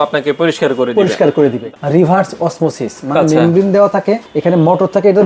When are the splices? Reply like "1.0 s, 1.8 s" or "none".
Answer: 1.6 s, 4.3 s